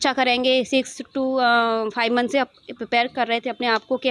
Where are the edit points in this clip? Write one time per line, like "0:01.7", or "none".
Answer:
none